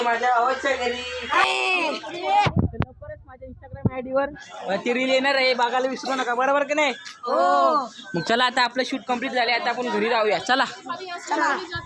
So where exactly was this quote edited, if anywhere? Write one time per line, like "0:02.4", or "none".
0:01.4